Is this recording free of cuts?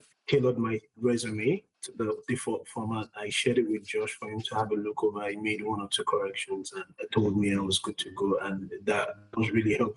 no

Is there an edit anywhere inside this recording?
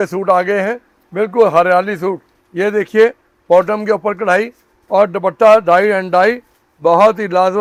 no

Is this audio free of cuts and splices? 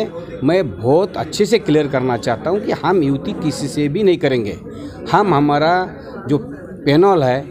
yes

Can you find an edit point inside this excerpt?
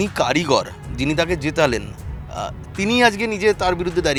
no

